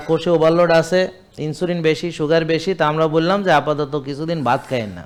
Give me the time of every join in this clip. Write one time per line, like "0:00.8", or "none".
none